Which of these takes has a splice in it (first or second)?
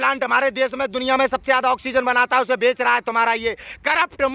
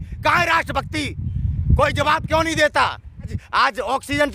second